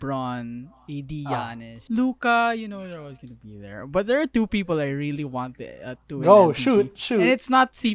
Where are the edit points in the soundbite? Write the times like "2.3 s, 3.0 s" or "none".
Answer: 1.7 s